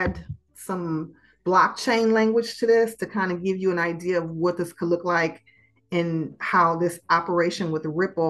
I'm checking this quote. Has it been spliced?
no; 0 cuts

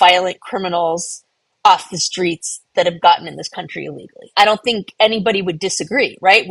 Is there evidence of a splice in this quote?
yes; 1 cut; at 4.3 s

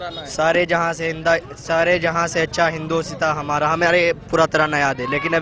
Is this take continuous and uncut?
yes; 0 cuts

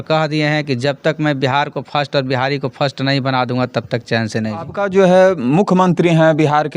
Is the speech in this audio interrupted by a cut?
yes; 1 cut; at 4.7 s

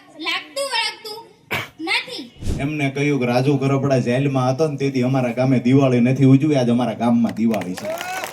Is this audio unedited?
no; 1 cut; at 2.4 s

